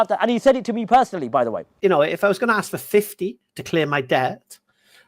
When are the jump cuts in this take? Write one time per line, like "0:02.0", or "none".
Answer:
0:01.7

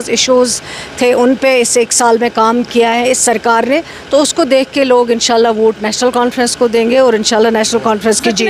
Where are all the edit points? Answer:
none

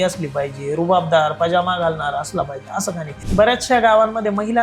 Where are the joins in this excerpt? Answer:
0:03.2

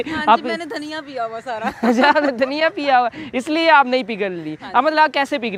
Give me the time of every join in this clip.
none

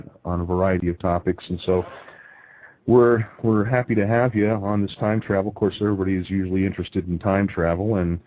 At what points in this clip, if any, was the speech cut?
0:04.3

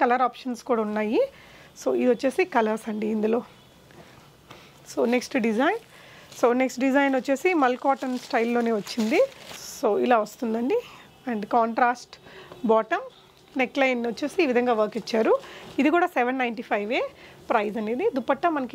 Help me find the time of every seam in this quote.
none

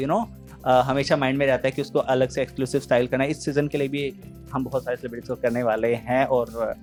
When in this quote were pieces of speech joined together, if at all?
none

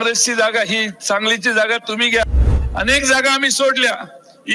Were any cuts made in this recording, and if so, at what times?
0:02.2

